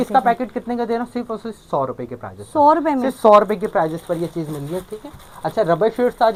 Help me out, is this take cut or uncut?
uncut